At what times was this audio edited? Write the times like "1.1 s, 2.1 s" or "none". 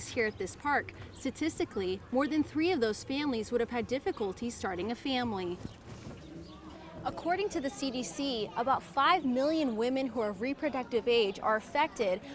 none